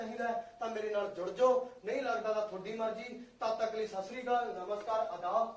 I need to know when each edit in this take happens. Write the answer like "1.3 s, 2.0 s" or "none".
none